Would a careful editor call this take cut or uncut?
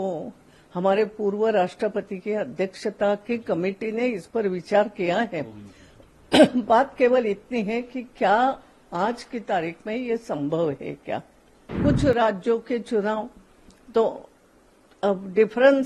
cut